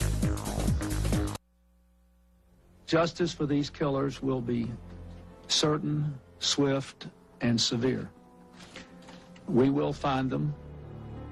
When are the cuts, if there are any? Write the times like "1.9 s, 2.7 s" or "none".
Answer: none